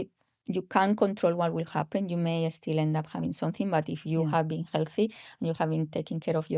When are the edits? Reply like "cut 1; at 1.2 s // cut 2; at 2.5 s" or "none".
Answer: none